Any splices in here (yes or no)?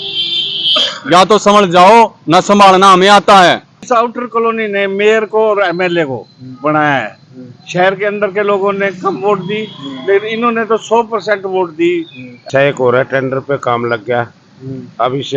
yes